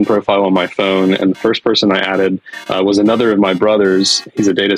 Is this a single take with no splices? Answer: yes; 0 cuts

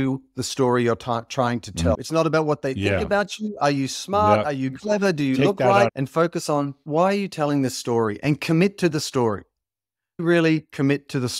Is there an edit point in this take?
yes; 2 cuts; at 2.0 s, 5.9 s

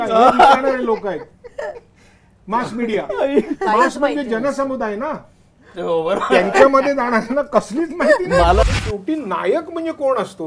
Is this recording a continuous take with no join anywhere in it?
no; 1 cut; at 8.6 s

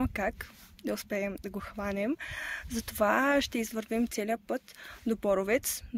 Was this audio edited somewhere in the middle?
no; 0 cuts

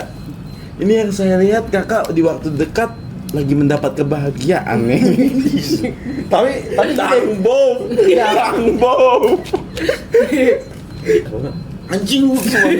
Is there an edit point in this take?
yes; 1 cut; at 11.2 s

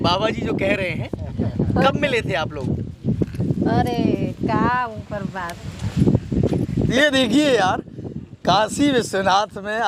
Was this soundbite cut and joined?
yes; 1 cut; at 6.9 s

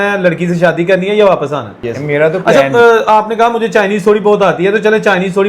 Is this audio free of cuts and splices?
no; 1 cut; at 2.5 s

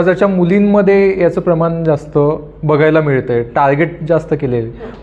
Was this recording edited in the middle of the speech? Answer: no; 0 cuts

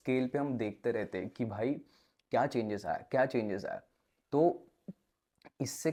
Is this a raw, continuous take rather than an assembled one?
yes; 0 cuts

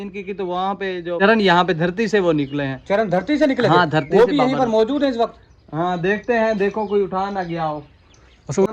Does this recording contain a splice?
no; 0 cuts

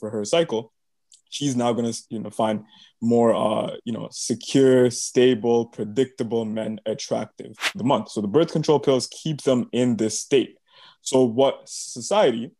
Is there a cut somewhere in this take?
yes; 1 cut; at 7.8 s

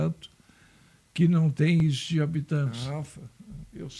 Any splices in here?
yes; 1 cut; at 2.8 s

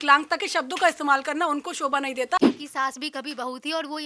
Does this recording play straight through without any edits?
no; 1 cut; at 2.4 s

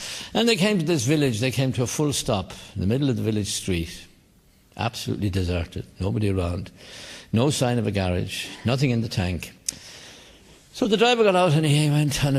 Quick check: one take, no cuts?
yes; 0 cuts

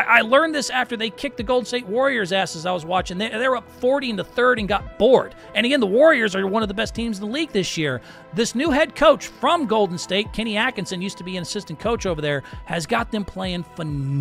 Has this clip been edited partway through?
no; 0 cuts

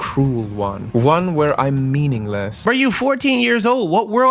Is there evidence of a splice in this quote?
yes; 1 cut; at 2.5 s

